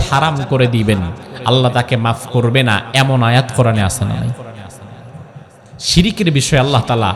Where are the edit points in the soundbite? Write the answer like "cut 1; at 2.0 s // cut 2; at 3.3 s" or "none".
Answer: none